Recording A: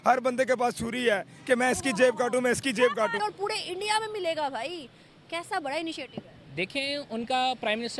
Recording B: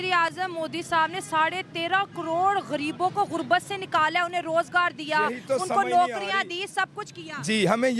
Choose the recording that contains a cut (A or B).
A